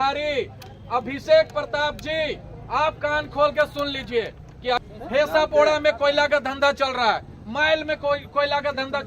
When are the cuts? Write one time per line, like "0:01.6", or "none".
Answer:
0:04.8